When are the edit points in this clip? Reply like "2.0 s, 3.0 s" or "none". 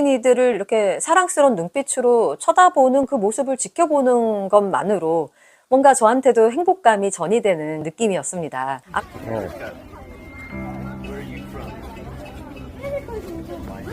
8.9 s